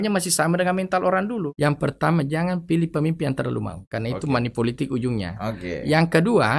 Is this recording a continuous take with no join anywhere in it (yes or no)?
no